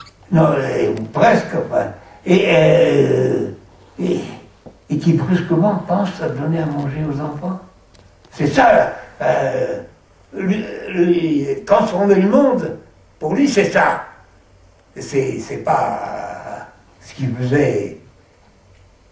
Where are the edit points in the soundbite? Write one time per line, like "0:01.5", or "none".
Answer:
0:05.1